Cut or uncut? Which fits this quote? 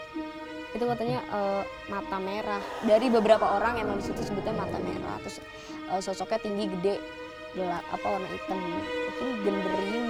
uncut